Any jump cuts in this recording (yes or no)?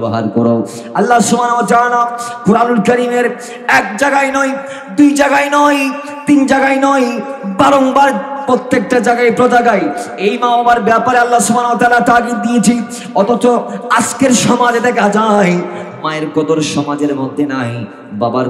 no